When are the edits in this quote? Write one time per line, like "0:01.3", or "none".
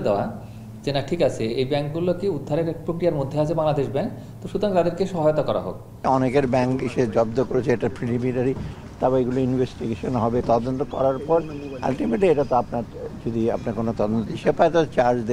0:06.1
0:10.4